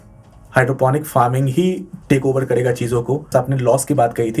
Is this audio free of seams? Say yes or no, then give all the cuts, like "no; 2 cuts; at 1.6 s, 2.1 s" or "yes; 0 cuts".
no; 1 cut; at 3.2 s